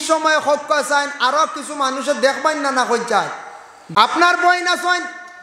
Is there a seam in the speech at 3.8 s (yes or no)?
yes